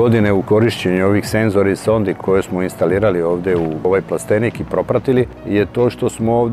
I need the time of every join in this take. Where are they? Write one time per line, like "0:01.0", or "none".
0:02.2
0:03.9
0:05.4